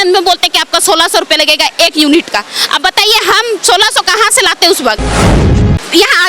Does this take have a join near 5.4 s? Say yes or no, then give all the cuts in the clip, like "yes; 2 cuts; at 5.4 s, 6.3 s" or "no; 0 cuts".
yes; 1 cut; at 5.4 s